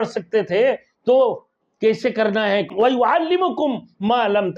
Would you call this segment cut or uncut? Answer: cut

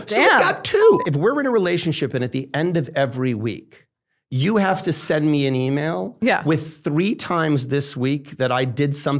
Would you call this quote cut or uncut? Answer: cut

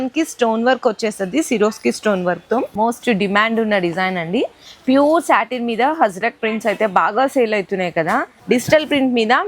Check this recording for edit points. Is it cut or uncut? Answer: cut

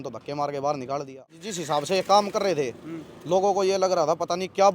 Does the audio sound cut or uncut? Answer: cut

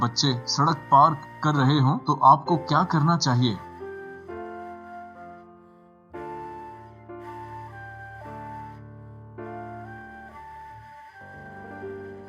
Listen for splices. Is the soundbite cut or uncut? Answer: uncut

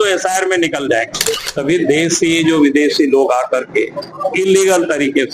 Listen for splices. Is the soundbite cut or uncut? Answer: cut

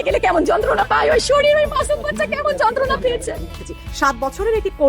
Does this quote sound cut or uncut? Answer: cut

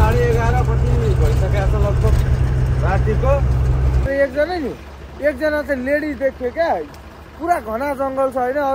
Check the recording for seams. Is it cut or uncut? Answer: cut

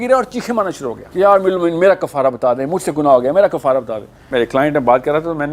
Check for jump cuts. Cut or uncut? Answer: cut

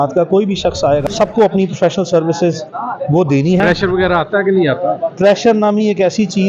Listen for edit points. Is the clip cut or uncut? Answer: cut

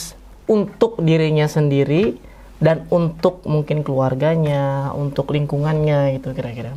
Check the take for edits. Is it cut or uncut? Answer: uncut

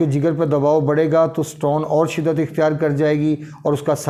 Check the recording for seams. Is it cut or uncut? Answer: uncut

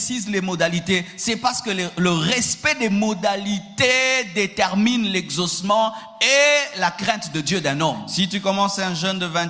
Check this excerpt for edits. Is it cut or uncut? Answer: cut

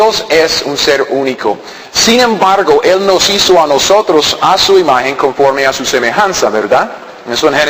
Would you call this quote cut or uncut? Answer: cut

